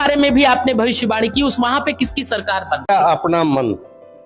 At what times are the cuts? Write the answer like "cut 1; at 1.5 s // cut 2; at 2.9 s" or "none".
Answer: cut 1; at 2.9 s